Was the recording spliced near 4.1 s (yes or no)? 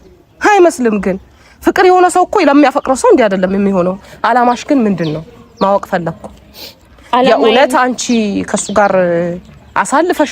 yes